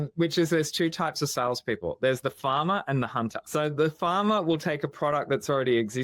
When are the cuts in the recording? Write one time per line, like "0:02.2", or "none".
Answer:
0:03.4